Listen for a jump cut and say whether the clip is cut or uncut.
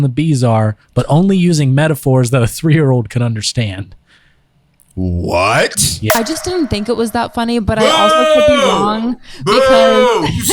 cut